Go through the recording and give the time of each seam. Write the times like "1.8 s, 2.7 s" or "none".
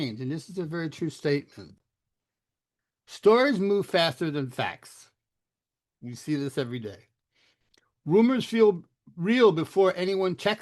1.7 s